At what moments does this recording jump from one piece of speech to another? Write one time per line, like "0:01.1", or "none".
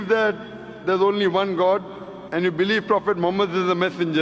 none